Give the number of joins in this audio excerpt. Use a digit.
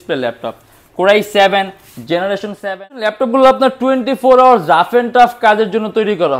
1